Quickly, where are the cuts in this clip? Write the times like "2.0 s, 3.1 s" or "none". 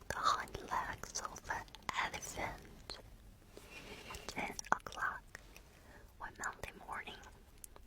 4.2 s